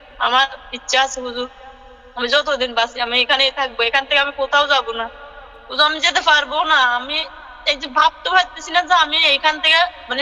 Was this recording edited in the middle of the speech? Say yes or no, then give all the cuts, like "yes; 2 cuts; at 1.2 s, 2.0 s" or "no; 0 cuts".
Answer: no; 0 cuts